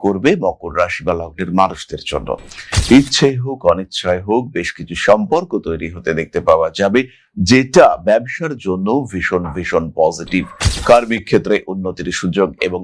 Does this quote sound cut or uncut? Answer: cut